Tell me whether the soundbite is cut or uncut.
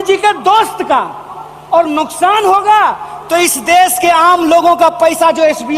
uncut